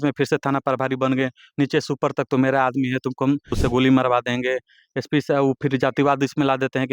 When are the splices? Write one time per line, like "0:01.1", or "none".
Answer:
0:03.5